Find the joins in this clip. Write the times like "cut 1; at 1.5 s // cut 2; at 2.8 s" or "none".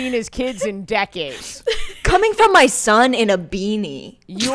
cut 1; at 1.9 s